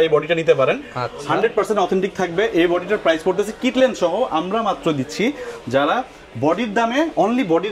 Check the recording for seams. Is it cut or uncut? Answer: uncut